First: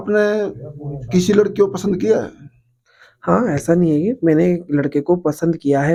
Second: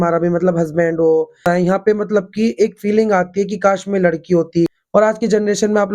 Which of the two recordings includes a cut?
second; 2 cuts; at 1.5 s, 4.8 s

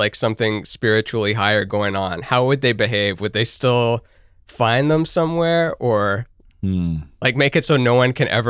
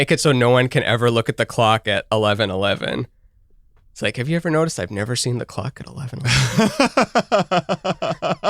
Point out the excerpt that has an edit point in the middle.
second; 1 cut; at 6.1 s

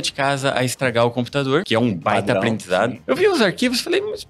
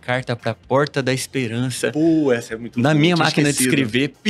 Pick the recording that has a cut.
first; 2 cuts; at 1.7 s, 3.0 s

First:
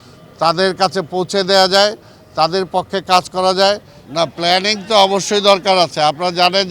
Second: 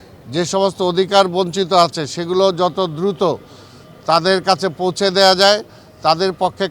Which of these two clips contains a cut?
first; 1 cut; at 4.0 s

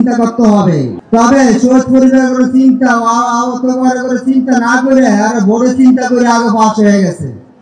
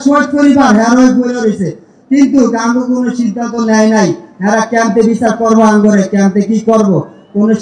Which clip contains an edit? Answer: first; 1 cut; at 0.9 s

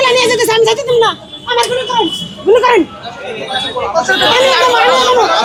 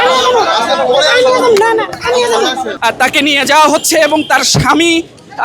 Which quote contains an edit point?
second; 1 cut; at 2.7 s

